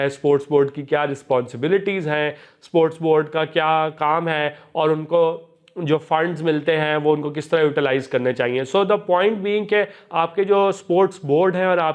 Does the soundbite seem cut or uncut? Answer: uncut